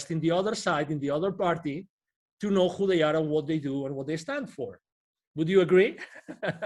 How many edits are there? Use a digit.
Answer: 0